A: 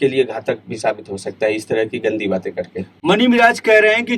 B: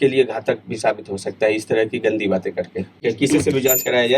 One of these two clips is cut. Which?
B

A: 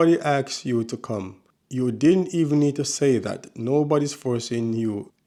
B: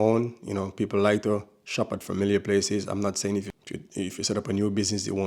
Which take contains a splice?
B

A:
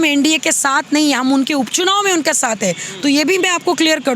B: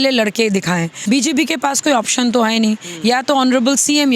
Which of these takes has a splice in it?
B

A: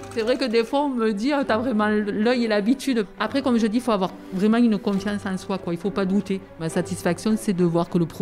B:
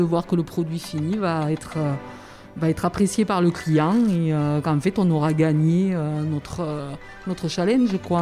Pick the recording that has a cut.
A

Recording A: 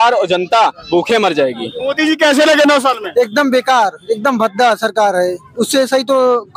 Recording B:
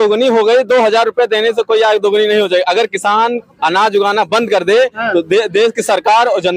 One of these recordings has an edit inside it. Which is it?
A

